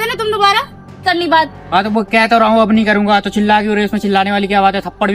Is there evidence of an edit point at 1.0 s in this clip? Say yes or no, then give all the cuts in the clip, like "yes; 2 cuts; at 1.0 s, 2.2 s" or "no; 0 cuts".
yes; 1 cut; at 1.0 s